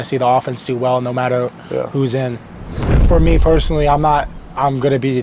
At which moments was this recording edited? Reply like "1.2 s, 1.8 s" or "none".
3.0 s